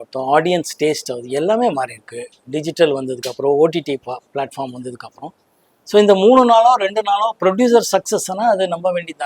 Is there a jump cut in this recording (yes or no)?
no